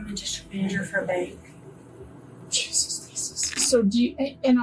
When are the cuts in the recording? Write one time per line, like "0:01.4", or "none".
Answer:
0:03.5

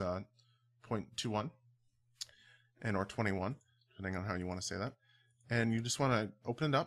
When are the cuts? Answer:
none

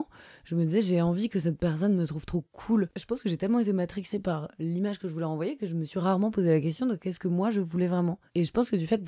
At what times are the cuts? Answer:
0:03.0

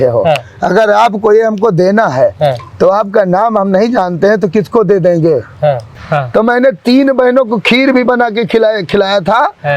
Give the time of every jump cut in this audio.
0:05.9

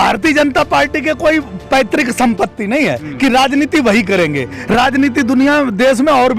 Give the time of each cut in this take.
none

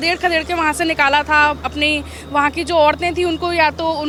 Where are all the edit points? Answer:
none

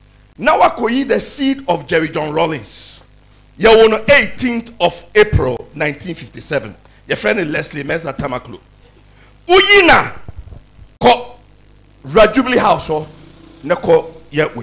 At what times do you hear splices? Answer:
none

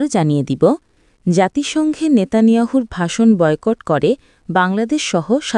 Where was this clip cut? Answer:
none

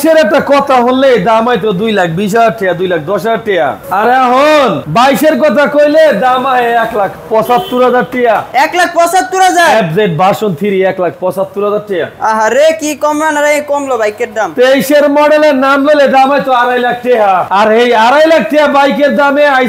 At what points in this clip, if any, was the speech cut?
none

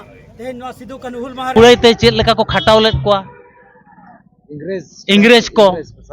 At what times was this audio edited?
0:01.5

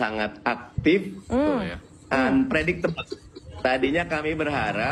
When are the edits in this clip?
none

